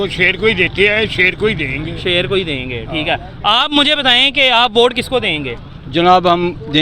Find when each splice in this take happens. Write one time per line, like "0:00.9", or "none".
none